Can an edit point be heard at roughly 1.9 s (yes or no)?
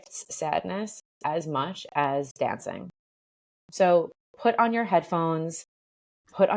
no